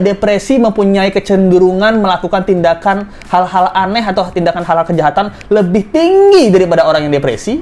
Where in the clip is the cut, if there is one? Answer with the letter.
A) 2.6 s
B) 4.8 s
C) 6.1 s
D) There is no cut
D